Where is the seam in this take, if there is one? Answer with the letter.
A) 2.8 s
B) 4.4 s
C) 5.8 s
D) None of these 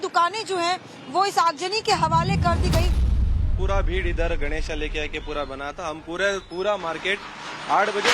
B